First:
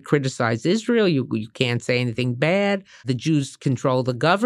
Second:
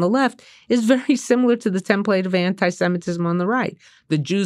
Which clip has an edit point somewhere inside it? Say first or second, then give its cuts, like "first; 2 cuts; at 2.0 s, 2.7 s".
first; 1 cut; at 3.0 s